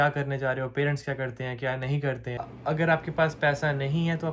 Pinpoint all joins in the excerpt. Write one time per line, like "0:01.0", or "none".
0:02.6